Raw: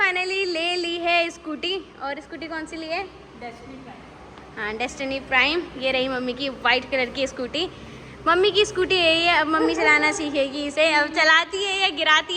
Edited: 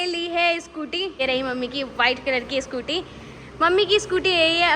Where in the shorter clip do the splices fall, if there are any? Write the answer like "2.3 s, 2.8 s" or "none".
1.2 s